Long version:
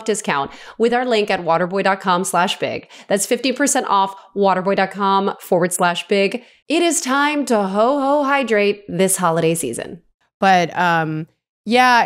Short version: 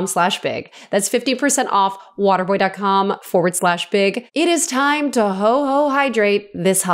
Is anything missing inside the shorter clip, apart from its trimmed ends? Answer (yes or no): yes